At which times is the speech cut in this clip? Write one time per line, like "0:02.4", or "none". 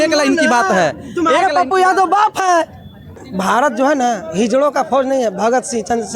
0:03.3